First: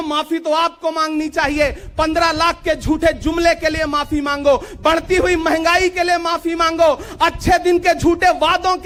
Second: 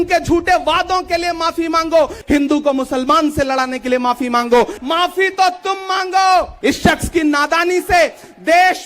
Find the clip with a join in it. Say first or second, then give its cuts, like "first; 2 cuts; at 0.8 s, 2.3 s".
second; 3 cuts; at 2.2 s, 4.8 s, 6.5 s